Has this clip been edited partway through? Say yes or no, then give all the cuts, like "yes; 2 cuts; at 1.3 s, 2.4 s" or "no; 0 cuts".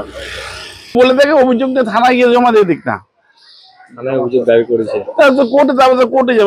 no; 0 cuts